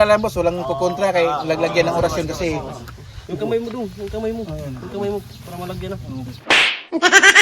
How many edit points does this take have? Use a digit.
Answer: 1